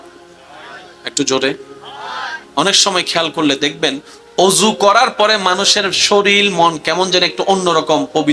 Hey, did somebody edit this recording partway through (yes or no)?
yes